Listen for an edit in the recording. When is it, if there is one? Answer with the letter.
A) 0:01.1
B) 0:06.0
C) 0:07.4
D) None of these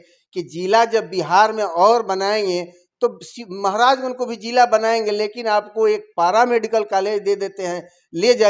D